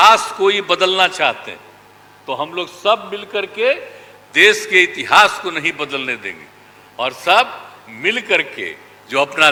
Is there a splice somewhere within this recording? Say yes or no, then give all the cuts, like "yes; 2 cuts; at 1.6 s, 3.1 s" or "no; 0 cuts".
no; 0 cuts